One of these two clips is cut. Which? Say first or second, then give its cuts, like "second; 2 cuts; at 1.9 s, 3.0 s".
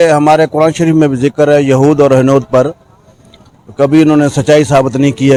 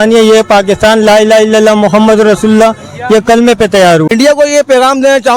second; 1 cut; at 4.1 s